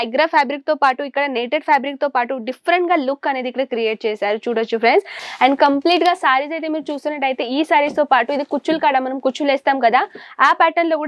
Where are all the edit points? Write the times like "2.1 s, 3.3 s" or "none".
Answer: 5.2 s